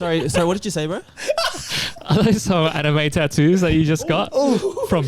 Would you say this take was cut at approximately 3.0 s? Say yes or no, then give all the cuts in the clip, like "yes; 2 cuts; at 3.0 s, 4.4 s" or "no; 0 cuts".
no; 0 cuts